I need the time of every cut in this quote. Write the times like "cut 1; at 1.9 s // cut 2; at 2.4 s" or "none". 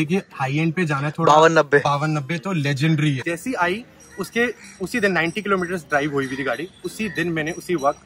cut 1; at 3.2 s